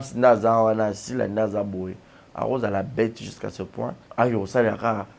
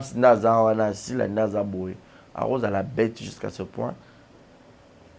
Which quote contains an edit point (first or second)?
first